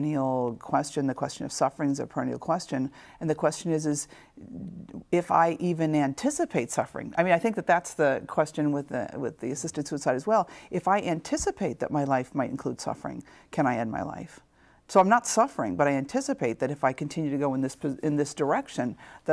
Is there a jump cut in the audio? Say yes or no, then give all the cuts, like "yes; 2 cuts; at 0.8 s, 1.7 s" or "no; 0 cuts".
no; 0 cuts